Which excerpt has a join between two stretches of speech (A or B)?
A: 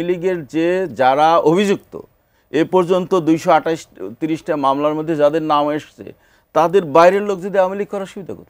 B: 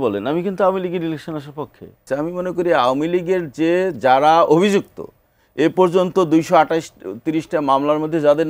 B